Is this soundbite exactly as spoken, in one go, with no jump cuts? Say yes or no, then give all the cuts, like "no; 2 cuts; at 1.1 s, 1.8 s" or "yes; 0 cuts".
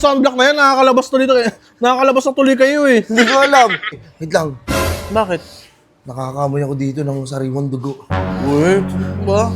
no; 1 cut; at 4.0 s